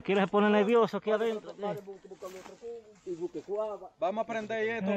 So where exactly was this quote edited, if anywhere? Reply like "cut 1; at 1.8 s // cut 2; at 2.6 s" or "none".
none